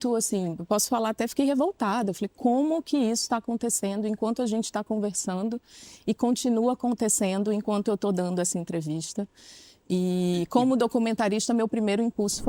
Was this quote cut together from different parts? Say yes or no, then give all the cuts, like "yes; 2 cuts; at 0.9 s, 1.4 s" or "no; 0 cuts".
no; 0 cuts